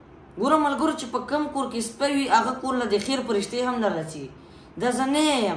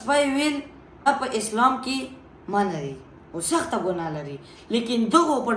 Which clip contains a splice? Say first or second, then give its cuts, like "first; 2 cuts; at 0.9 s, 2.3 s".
second; 1 cut; at 1.1 s